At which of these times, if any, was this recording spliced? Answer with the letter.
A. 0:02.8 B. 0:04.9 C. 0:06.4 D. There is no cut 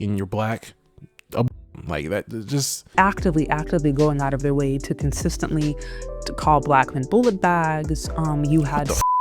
A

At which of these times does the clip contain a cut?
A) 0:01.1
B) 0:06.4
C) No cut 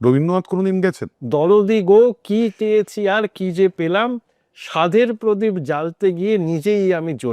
A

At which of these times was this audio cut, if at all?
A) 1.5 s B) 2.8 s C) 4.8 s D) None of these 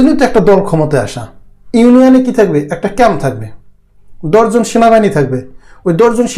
A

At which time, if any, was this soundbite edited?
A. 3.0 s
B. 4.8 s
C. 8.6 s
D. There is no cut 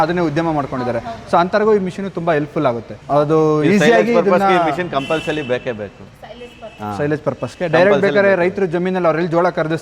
D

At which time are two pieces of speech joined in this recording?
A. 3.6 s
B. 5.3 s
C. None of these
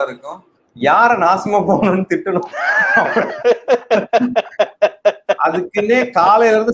C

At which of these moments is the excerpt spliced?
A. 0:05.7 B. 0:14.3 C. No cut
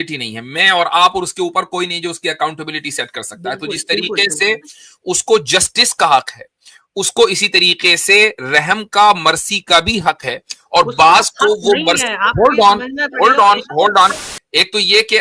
B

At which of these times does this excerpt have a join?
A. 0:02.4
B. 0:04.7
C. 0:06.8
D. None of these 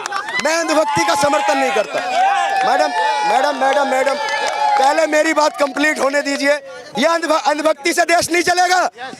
C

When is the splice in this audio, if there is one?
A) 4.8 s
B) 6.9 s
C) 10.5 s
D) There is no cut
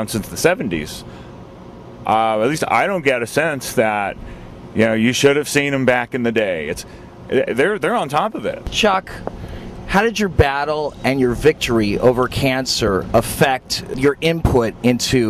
C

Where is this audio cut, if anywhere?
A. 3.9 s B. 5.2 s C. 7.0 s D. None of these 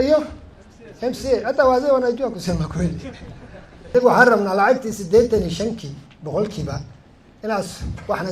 A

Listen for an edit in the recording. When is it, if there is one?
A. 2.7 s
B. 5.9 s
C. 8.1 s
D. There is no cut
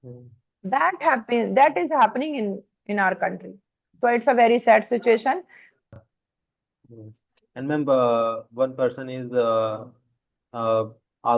B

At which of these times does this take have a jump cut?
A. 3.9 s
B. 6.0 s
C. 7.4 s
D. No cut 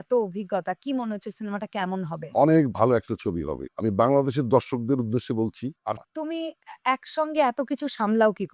B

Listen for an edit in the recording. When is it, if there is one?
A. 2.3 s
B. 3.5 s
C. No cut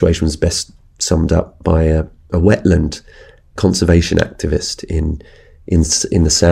B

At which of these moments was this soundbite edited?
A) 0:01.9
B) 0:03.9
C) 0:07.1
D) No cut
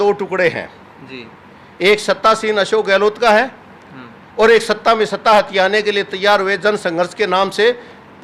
D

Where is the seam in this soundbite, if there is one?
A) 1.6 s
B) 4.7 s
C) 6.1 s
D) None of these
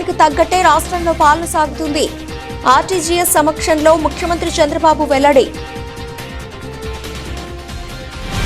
C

